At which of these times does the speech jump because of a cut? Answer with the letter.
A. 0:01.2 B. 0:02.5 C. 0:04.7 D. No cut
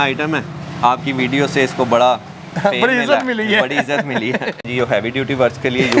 C